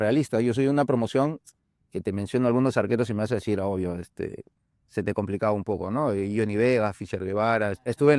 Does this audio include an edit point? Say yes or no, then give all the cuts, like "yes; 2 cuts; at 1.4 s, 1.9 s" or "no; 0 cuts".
no; 0 cuts